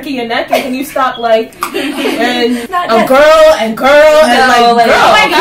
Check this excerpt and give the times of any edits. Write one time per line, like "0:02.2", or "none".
0:02.6